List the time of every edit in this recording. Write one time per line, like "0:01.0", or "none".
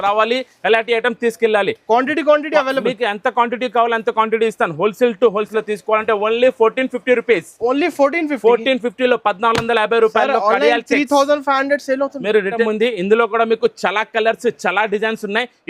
0:05.5
0:12.6